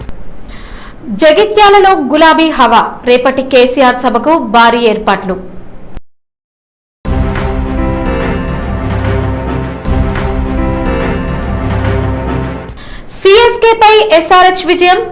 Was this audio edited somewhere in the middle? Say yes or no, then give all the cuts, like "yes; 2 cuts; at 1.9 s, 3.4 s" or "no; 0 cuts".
no; 0 cuts